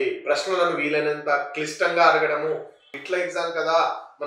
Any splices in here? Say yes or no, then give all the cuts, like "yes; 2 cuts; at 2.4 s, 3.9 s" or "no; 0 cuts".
yes; 1 cut; at 2.9 s